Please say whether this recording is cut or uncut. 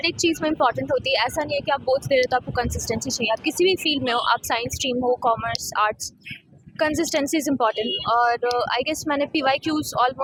uncut